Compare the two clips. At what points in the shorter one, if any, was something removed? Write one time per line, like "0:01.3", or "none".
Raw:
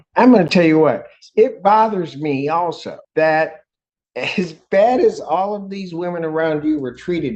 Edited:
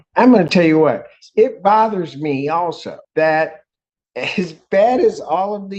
none